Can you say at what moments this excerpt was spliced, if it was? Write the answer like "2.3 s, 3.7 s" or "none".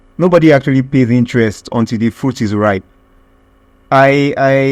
none